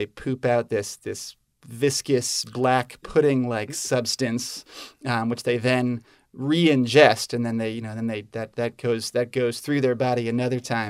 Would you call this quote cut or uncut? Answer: uncut